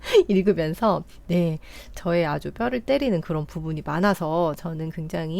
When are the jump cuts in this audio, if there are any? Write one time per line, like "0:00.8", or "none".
none